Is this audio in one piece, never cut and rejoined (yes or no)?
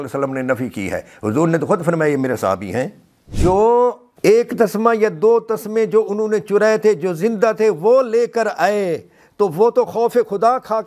no